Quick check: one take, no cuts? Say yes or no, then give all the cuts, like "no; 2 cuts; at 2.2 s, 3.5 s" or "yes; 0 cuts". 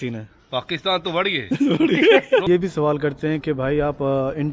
no; 1 cut; at 2.4 s